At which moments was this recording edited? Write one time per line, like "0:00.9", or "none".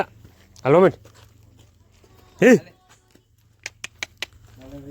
none